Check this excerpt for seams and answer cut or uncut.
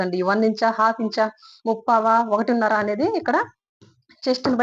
uncut